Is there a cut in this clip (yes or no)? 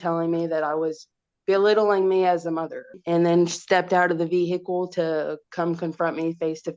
yes